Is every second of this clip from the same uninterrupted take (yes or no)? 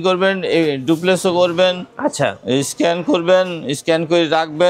yes